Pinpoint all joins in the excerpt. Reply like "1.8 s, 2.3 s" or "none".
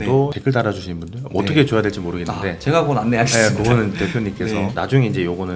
none

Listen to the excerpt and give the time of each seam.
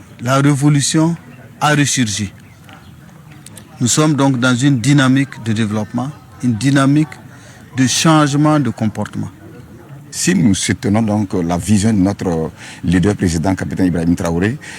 6.2 s

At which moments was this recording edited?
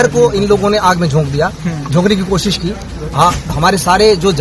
none

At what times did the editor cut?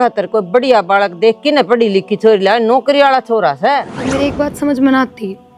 4.0 s

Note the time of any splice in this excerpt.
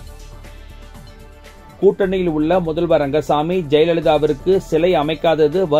1.4 s

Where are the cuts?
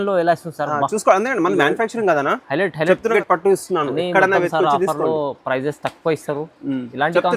3.1 s

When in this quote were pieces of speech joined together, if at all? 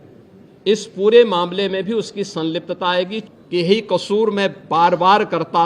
3.2 s

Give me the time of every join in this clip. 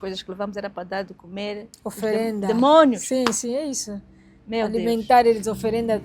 none

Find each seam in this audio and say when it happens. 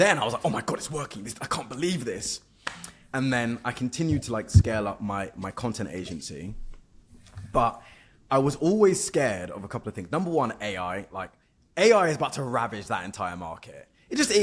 none

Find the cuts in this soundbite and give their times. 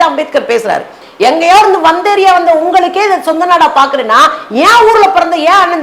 1.0 s

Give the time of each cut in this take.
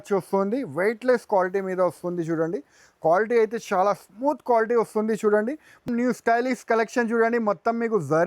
5.9 s

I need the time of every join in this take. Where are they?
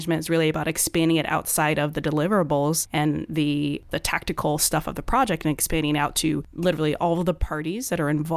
2.8 s, 3.9 s, 6.5 s

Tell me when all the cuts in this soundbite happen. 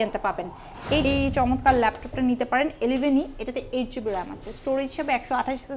1.1 s

